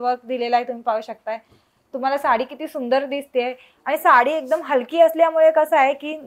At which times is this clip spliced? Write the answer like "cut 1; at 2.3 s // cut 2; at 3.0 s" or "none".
none